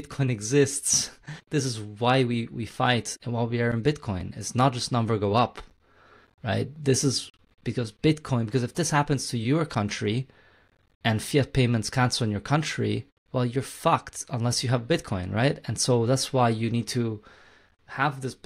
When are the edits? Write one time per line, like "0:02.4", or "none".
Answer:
0:01.4
0:03.2
0:13.1